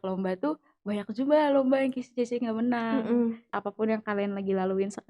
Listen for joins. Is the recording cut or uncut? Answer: cut